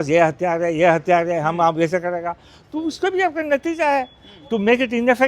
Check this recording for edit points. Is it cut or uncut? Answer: uncut